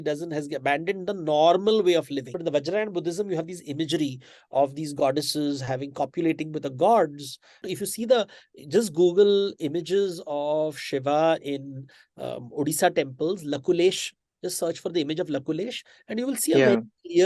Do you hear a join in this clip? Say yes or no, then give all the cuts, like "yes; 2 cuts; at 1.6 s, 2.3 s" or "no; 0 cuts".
yes; 2 cuts; at 2.3 s, 7.6 s